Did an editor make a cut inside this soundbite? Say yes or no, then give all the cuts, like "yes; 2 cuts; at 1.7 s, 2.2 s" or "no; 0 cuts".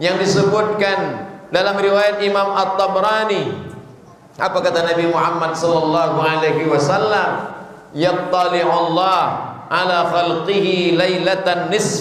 no; 0 cuts